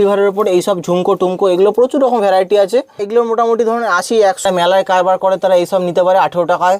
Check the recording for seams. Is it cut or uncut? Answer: cut